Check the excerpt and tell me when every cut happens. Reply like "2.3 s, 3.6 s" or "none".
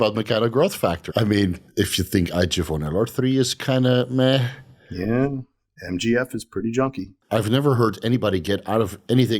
1.1 s, 7.1 s